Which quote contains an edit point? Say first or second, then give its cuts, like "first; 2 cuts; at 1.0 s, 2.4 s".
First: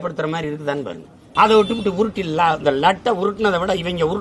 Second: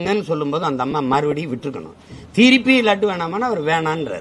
first; 1 cut; at 1.2 s